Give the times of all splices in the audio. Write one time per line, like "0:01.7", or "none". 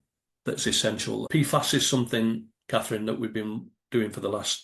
0:01.3